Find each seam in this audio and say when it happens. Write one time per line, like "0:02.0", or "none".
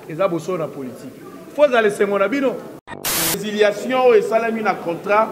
0:03.3